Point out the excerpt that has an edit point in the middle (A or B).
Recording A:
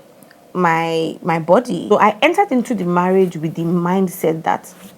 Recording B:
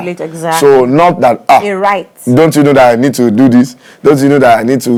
A